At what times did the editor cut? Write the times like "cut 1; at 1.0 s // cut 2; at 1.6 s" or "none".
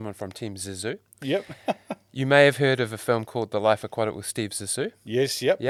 none